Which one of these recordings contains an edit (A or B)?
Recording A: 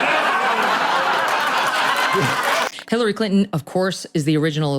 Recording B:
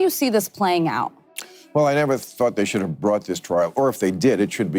A